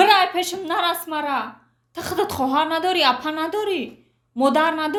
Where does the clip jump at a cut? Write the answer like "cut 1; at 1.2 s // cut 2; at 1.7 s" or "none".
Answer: none